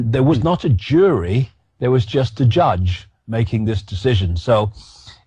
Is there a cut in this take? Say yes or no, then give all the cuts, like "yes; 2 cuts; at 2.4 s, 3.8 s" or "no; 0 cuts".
yes; 1 cut; at 4.3 s